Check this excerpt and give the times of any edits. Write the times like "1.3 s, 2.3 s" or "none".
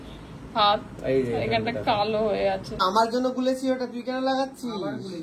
2.9 s